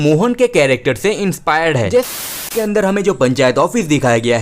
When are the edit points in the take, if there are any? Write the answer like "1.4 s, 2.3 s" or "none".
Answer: 2.4 s